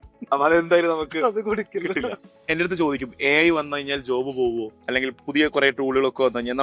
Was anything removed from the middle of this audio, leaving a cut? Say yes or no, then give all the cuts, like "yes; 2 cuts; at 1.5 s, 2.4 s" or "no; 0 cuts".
yes; 2 cuts; at 2.3 s, 4.8 s